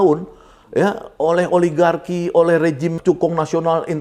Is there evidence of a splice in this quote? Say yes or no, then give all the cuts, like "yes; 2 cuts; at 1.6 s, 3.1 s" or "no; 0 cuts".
yes; 1 cut; at 3.0 s